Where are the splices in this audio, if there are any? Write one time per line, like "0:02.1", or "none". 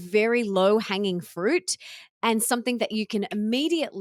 none